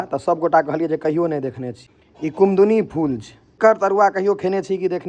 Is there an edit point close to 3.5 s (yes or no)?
yes